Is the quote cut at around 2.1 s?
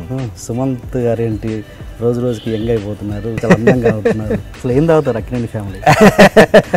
no; 2 cuts; at 3.4 s, 4.5 s

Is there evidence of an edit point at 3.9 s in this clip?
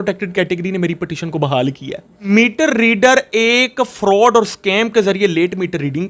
no; 1 cut; at 2.3 s

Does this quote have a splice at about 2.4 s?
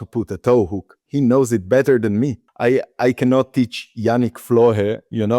yes; 1 cut; at 2.4 s

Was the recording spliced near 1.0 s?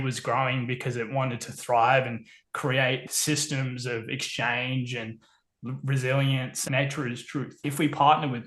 no; 3 cuts; at 3.1 s, 6.6 s, 7.6 s

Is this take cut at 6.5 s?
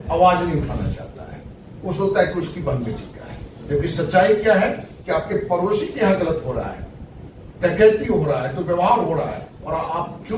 no; 0 cuts

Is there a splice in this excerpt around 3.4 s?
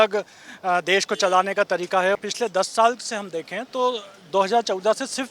no; 1 cut; at 2.2 s

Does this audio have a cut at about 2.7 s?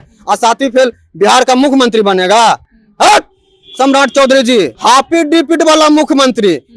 no; 1 cut; at 4.7 s

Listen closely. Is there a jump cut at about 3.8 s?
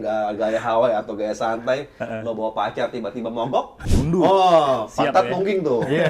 yes; 1 cut; at 3.8 s

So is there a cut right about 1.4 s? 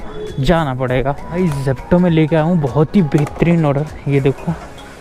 yes; 1 cut; at 1.4 s

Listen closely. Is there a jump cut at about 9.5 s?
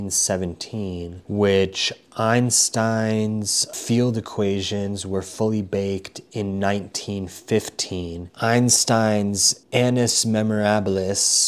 yes; 4 cuts; at 1.2 s, 3.7 s, 8.2 s, 9.5 s

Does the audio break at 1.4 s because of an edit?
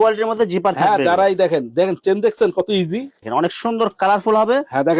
no; 1 cut; at 3.1 s

